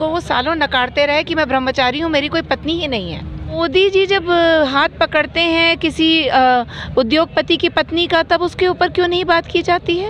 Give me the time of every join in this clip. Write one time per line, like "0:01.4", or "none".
0:03.6